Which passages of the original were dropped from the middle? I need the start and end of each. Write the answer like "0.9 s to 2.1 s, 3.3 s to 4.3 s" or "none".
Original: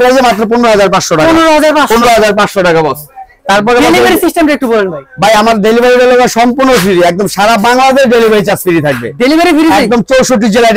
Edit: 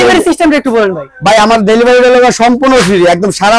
none